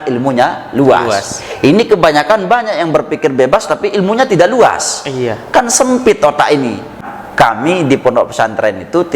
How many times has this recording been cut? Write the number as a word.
one